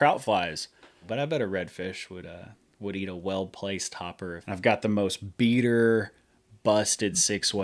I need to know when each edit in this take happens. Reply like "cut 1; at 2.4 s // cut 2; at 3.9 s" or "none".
cut 1; at 1.1 s // cut 2; at 4.4 s